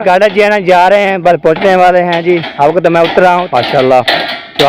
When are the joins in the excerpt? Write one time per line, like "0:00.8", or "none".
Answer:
0:03.4